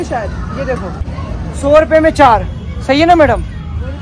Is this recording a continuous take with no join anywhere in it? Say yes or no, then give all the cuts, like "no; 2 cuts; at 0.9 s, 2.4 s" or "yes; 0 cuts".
no; 1 cut; at 1.0 s